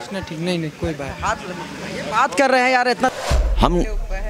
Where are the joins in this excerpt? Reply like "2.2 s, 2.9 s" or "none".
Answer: 3.1 s